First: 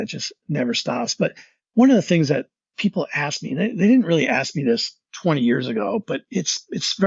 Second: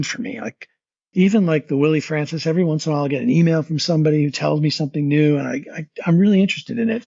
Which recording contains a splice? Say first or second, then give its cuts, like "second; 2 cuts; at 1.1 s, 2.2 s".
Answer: first; 1 cut; at 2.6 s